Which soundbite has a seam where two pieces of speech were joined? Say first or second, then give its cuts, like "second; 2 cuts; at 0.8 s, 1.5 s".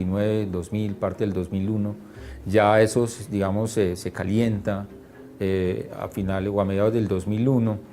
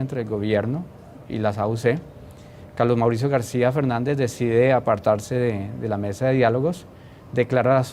first; 1 cut; at 6.0 s